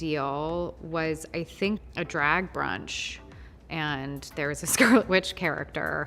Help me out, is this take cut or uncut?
cut